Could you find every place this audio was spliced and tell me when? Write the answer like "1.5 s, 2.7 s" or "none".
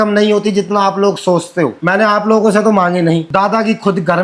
1.8 s, 3.3 s